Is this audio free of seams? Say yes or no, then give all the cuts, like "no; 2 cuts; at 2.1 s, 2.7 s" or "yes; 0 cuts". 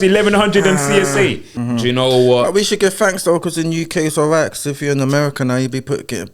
no; 1 cut; at 1.5 s